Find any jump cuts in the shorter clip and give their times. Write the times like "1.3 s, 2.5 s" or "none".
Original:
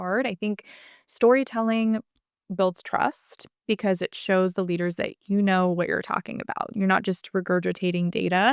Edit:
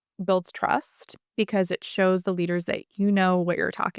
none